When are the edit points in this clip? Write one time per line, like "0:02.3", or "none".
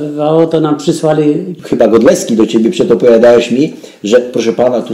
0:01.5